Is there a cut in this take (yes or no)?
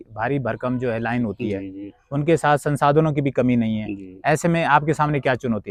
no